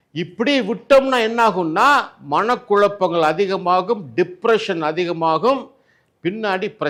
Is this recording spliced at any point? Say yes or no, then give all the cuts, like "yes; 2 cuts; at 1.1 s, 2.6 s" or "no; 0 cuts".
no; 0 cuts